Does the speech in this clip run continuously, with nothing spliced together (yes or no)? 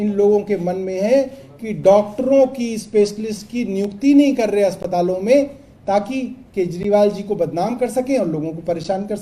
yes